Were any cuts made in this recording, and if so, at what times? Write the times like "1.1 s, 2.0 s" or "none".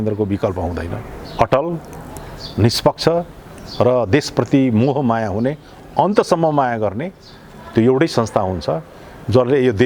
1.1 s